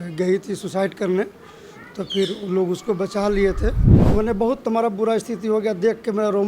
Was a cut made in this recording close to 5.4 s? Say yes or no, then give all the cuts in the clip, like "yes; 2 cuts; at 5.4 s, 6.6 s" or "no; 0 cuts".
no; 1 cut; at 3.9 s